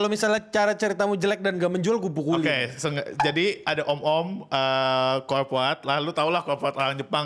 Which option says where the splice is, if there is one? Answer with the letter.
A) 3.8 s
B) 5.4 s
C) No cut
C